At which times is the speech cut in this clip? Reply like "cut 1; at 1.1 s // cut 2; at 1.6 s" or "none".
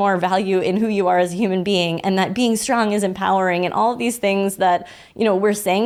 none